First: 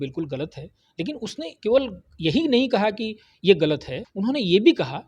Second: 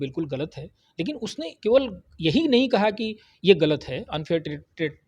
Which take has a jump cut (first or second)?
first